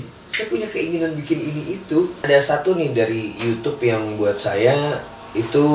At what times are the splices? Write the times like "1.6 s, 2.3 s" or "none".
2.2 s